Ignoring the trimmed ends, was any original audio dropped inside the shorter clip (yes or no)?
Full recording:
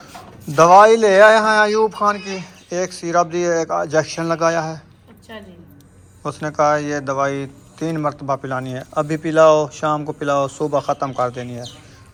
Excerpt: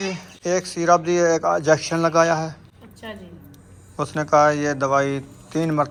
no